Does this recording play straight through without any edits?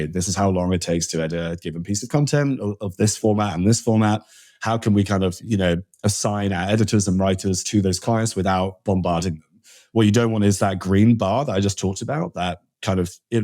yes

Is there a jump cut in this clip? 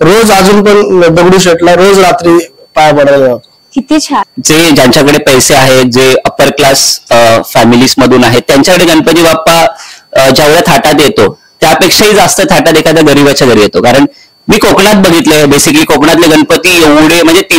yes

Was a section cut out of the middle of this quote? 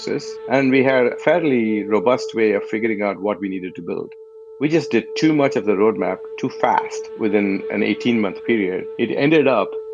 yes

